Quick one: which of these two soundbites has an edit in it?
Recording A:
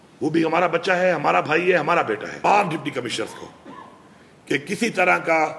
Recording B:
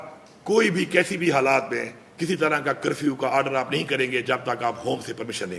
A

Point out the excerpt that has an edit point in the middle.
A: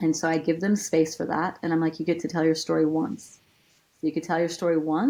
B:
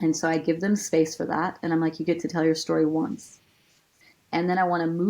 B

